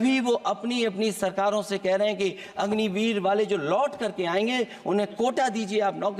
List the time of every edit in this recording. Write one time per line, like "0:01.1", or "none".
none